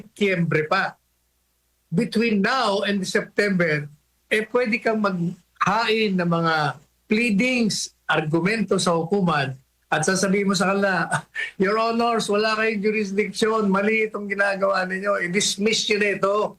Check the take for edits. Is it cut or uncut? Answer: uncut